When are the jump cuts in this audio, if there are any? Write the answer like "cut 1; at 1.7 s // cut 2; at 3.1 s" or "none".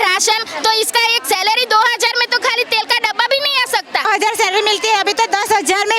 cut 1; at 4.1 s